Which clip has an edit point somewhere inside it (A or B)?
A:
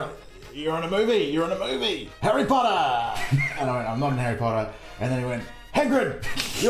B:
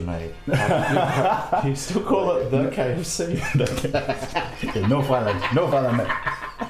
A